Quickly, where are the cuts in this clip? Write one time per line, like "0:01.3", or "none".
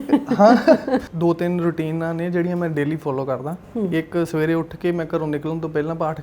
0:01.1